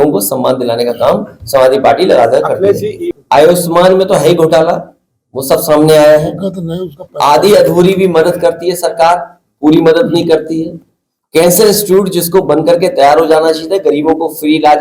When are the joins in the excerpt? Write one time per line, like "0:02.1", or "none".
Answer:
0:03.1